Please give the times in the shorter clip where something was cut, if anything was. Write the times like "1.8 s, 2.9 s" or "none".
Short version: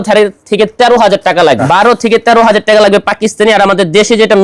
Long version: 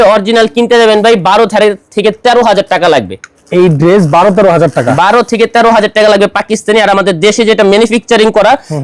1.6 s